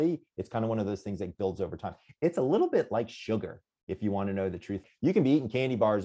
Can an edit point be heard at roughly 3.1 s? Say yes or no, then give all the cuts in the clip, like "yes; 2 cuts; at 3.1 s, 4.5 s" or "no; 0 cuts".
no; 1 cut; at 4.9 s